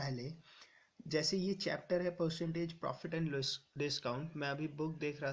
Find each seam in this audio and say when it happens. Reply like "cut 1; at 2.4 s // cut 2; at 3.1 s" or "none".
cut 1; at 2.8 s